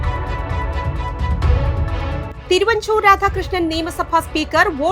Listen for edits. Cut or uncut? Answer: cut